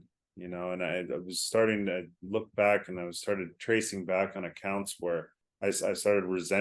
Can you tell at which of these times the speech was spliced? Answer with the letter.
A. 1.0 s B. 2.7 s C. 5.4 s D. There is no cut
C